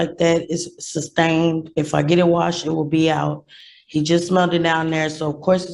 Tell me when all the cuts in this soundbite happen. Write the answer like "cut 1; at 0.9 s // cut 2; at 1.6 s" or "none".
none